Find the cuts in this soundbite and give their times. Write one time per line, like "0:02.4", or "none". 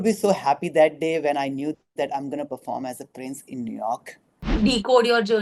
0:04.5